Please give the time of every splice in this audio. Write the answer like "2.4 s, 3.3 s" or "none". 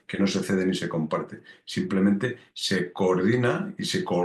none